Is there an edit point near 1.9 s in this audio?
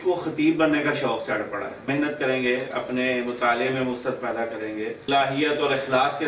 yes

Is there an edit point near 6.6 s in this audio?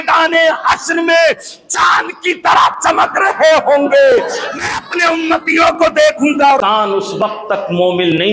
yes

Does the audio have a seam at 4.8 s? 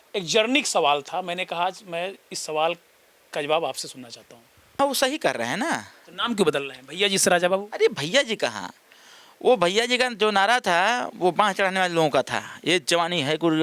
yes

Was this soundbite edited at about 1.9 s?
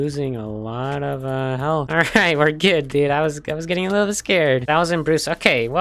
no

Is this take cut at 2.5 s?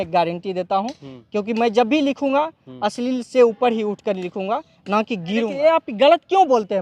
no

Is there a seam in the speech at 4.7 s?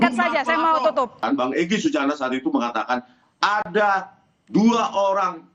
no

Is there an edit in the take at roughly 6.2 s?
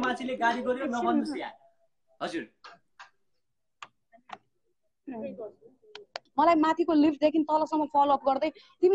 yes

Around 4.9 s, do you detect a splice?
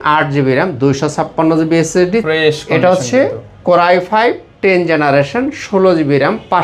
no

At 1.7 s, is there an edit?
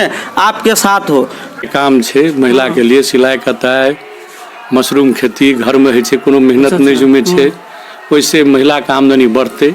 yes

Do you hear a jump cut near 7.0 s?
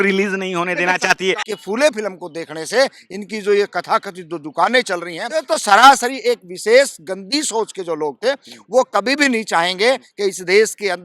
no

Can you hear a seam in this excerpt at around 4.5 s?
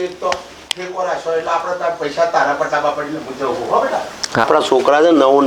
yes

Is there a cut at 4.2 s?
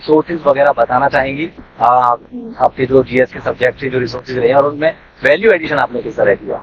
no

